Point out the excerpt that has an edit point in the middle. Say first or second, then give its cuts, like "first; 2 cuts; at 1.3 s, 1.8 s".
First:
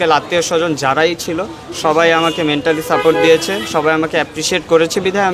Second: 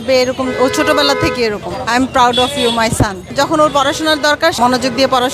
second; 3 cuts; at 1.7 s, 3.3 s, 4.6 s